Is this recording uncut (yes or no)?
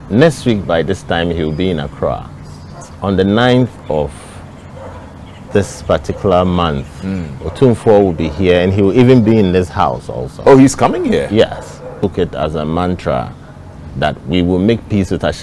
no